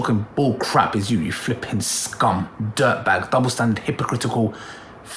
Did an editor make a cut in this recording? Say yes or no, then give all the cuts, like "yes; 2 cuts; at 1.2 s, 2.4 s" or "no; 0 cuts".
no; 0 cuts